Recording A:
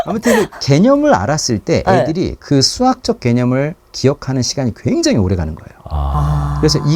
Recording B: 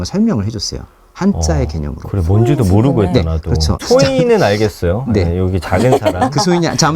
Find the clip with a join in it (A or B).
B